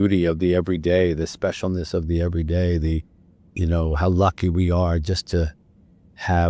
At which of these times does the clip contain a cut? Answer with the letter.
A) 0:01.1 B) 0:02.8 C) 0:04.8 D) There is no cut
D